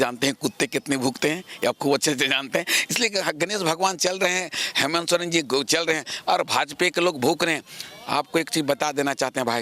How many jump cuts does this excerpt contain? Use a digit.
0